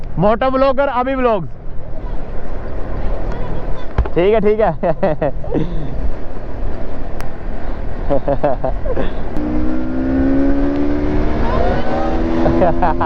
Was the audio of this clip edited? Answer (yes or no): no